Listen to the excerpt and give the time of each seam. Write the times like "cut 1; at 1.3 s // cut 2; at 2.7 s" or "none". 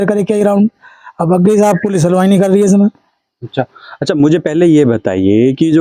none